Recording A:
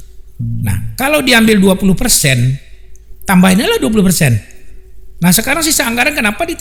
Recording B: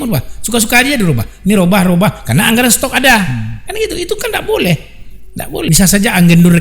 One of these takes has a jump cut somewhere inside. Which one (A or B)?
B